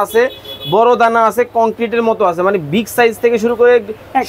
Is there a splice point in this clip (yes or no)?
no